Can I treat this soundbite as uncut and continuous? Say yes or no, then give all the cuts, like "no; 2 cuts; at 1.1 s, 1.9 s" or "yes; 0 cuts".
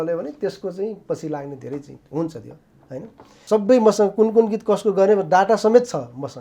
no; 1 cut; at 3.4 s